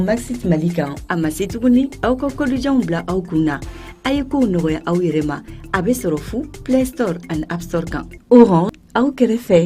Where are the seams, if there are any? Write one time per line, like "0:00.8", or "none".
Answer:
0:08.7